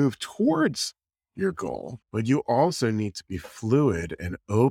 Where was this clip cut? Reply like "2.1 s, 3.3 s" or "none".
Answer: 1.9 s